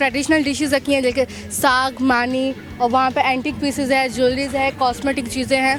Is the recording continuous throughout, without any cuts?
yes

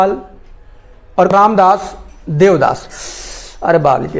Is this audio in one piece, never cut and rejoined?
no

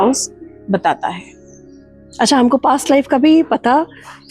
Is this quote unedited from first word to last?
yes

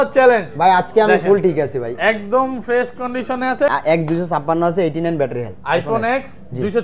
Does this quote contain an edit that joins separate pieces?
yes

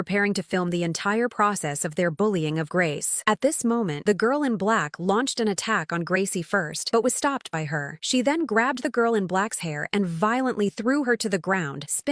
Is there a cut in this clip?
no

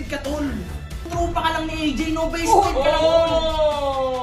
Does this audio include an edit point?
yes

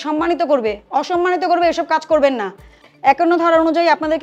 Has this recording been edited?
yes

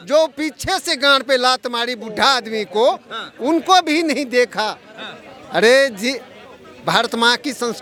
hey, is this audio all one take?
yes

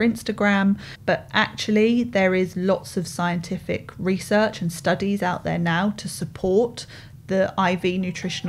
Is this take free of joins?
no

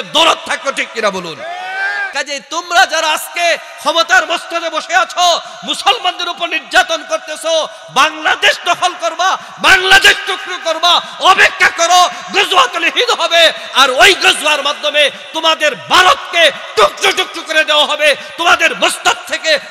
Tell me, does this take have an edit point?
yes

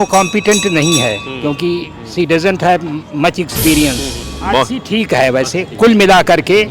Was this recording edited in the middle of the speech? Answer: yes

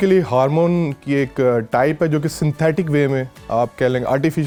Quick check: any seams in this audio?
no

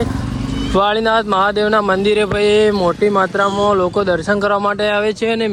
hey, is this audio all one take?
yes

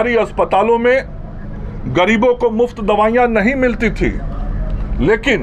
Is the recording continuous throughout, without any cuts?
yes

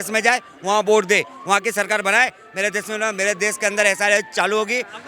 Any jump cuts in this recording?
no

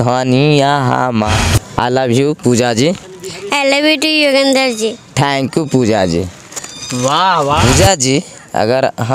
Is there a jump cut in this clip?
yes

